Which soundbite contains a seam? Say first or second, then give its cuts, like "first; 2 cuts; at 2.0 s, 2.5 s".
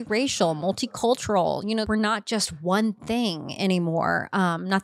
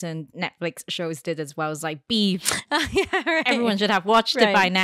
first; 1 cut; at 1.8 s